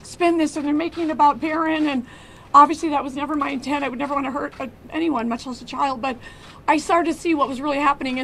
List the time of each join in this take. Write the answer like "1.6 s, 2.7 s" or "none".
4.9 s

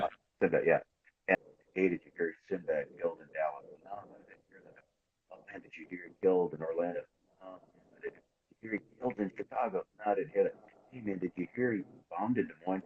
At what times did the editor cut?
1.4 s

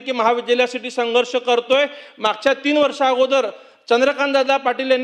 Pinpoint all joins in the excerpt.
none

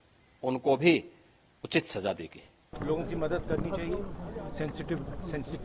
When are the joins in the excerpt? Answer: 2.7 s

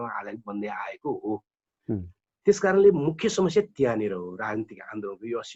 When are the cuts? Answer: none

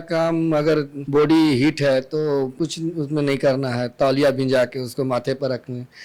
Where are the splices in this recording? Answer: 1.0 s, 2.5 s

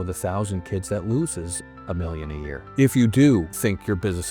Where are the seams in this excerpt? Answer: 2.7 s, 3.5 s

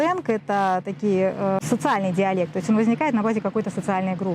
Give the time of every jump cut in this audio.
1.6 s

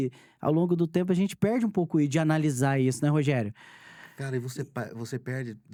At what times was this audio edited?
none

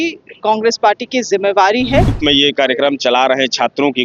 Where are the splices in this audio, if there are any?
2.1 s

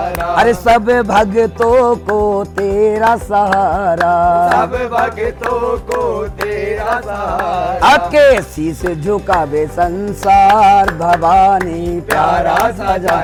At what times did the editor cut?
none

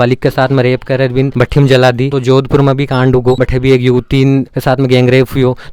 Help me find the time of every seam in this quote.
2.1 s, 3.4 s

